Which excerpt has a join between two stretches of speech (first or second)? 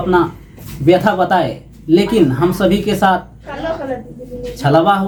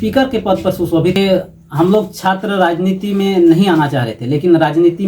second